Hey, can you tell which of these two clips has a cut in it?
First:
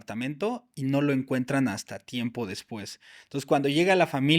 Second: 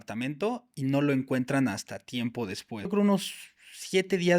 second; 1 cut; at 2.9 s

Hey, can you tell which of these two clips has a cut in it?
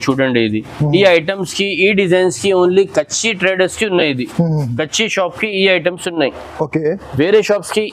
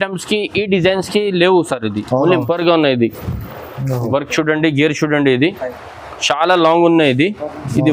second; 1 cut; at 2.4 s

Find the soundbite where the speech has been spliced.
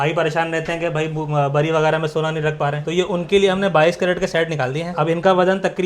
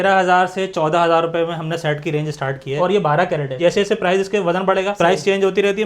second; 2 cuts; at 2.8 s, 3.6 s

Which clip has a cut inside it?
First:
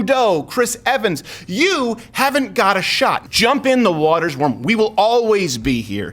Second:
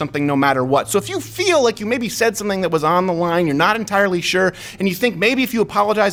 first; 1 cut; at 3.2 s

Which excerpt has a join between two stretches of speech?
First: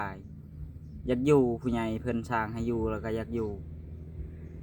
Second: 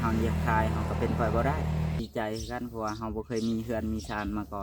second; 1 cut; at 2.0 s

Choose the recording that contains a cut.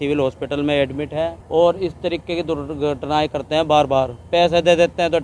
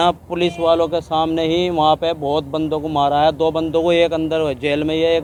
first; 1 cut; at 1.4 s

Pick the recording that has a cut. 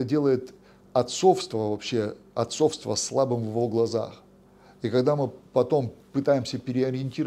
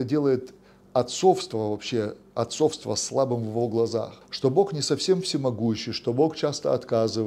second; 1 cut; at 4.2 s

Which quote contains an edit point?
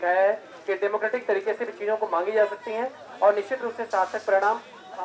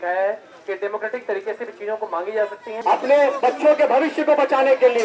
second; 1 cut; at 2.7 s

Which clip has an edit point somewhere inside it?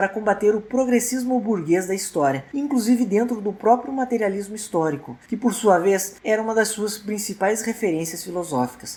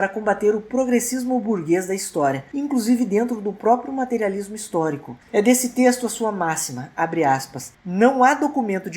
second; 1 cut; at 5.1 s

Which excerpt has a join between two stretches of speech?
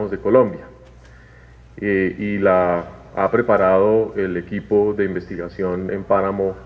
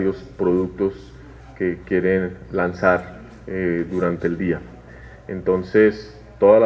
first; 1 cut; at 2.8 s

